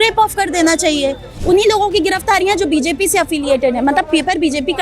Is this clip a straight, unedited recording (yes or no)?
no